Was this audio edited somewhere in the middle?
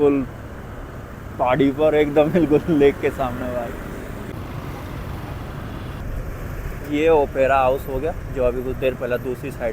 yes; 1 cut; at 4.3 s

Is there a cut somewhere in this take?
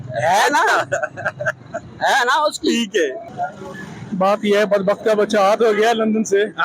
yes; 1 cut; at 3.2 s

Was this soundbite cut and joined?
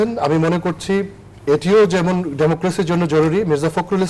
no; 0 cuts

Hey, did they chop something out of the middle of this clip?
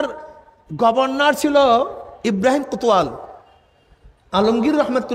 no; 0 cuts

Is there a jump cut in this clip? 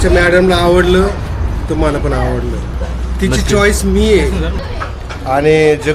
yes; 2 cuts; at 2.8 s, 4.7 s

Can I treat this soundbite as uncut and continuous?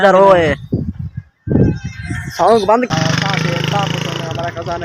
no; 1 cut; at 2.9 s

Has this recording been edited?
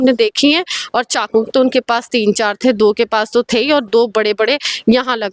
no; 0 cuts

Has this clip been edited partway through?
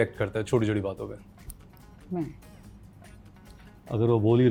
no; 0 cuts

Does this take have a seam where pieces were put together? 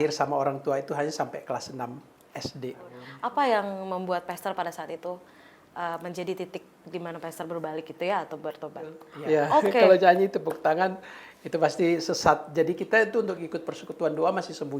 yes; 2 cuts; at 3.0 s, 9.1 s

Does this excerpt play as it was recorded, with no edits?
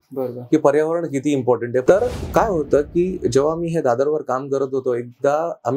no; 1 cut; at 1.8 s

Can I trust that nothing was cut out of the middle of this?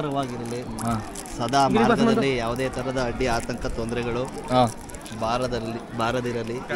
yes; 0 cuts

